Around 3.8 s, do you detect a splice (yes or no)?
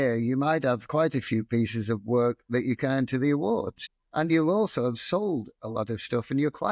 yes